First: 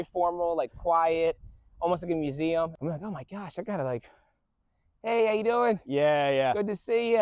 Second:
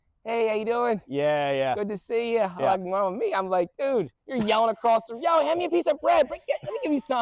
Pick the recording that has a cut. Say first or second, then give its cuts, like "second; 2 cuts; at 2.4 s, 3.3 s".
first; 1 cut; at 2.7 s